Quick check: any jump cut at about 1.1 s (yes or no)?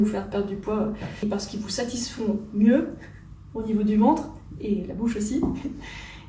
yes